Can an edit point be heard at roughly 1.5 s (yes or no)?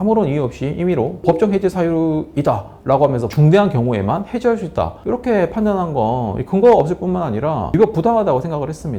no